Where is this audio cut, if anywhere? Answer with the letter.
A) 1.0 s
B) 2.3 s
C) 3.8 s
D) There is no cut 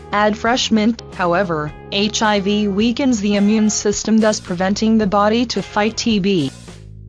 D